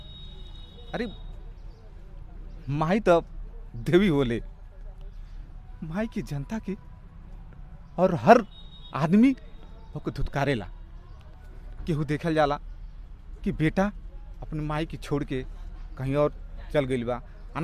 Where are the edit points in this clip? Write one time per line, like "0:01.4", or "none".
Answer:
none